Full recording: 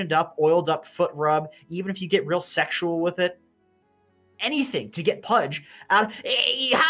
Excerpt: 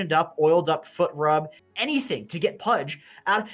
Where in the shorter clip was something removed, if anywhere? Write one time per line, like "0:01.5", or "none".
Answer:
0:01.6